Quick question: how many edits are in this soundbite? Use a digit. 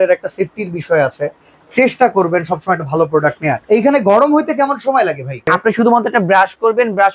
2